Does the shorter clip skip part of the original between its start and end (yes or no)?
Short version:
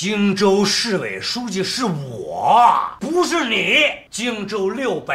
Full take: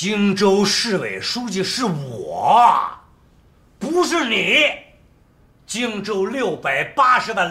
yes